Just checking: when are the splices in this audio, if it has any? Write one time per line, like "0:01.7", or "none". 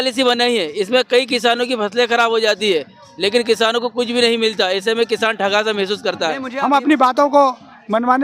0:06.4